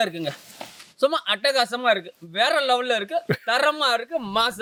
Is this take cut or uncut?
uncut